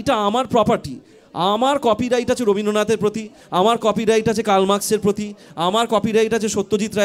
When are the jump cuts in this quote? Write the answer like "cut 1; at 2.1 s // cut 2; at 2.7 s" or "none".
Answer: none